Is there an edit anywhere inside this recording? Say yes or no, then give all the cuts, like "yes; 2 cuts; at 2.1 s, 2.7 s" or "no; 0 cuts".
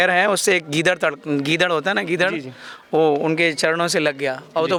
no; 0 cuts